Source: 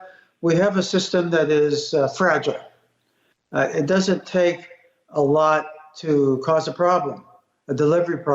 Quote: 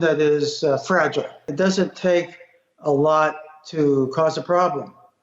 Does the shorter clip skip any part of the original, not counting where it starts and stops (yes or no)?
yes